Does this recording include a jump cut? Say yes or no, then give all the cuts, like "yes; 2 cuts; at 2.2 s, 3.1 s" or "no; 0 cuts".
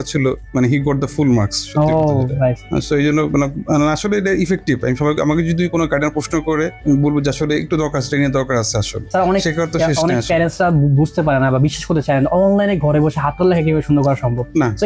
no; 0 cuts